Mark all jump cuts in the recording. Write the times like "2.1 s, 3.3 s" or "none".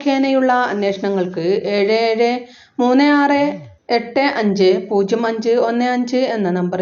3.7 s